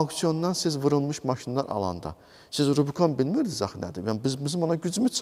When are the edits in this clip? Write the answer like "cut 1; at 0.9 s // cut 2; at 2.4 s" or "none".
none

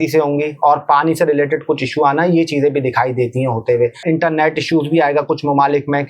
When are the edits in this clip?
cut 1; at 4.0 s

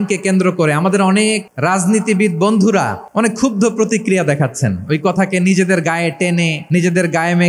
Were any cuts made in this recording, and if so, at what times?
cut 1; at 1.5 s // cut 2; at 3.0 s // cut 3; at 6.6 s

